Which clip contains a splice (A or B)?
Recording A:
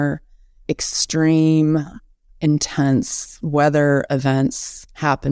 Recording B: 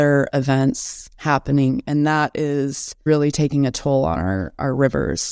B